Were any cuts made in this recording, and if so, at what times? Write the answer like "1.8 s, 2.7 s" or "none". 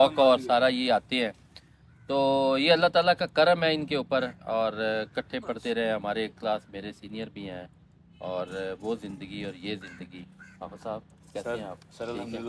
none

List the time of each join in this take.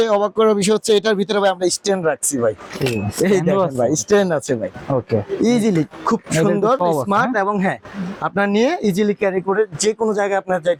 none

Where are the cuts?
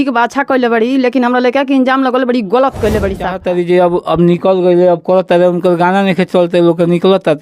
3.4 s

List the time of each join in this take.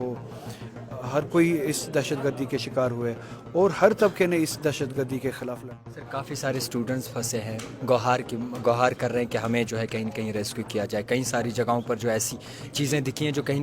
5.6 s

